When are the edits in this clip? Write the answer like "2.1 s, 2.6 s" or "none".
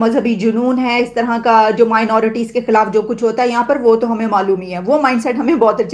none